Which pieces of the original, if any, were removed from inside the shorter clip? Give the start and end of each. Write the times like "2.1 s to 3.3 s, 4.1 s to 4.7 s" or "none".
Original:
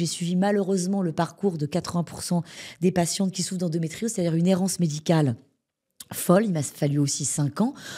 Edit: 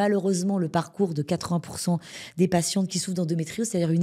none